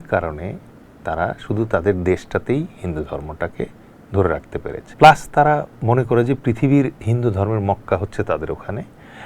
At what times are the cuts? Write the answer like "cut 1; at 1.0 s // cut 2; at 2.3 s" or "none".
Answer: cut 1; at 4.8 s

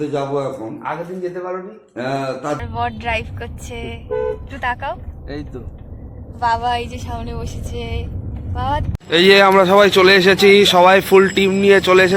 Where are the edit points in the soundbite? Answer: cut 1; at 2.6 s // cut 2; at 8.8 s

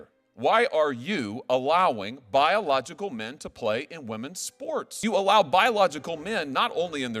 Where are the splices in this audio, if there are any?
cut 1; at 5.0 s

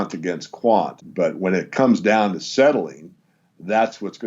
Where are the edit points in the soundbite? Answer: cut 1; at 1.0 s

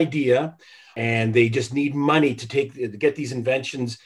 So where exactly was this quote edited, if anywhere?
cut 1; at 0.9 s

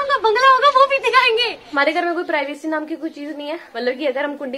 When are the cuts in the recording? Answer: cut 1; at 1.7 s // cut 2; at 3.7 s

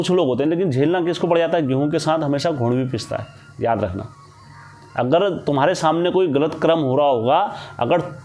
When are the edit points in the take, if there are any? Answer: none

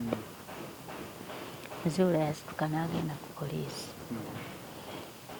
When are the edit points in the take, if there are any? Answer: none

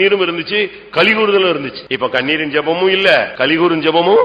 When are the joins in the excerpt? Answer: cut 1; at 1.8 s // cut 2; at 3.3 s

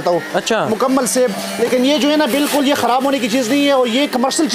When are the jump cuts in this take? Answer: none

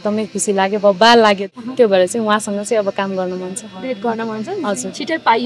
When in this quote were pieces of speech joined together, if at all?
cut 1; at 1.4 s

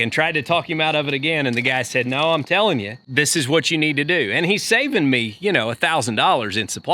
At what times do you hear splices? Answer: cut 1; at 3.0 s

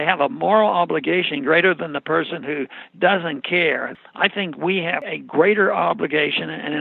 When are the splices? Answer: cut 1; at 3.9 s // cut 2; at 5.0 s

